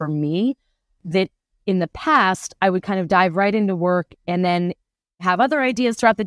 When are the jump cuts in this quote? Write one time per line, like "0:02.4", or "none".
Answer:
0:05.2